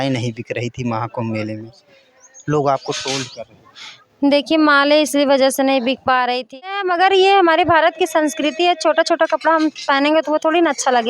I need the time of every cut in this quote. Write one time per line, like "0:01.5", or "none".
0:06.6